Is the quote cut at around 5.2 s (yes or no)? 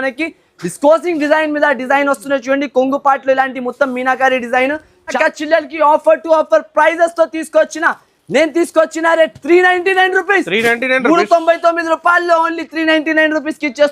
yes